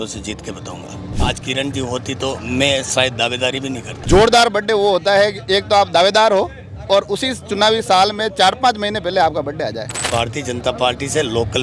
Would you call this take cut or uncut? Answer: cut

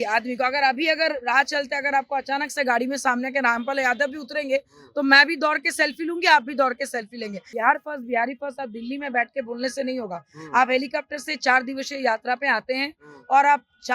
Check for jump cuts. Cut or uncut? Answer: cut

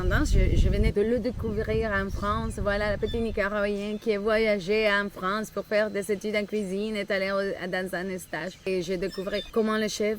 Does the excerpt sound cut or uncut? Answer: cut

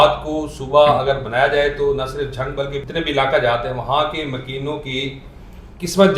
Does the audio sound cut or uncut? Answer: cut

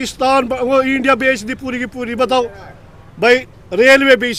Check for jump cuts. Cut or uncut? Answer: uncut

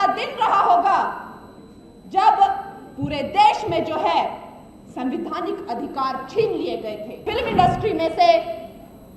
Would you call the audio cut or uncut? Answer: cut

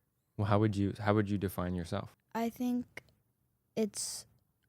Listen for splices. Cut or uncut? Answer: cut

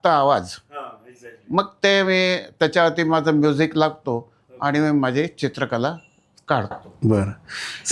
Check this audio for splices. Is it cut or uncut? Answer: uncut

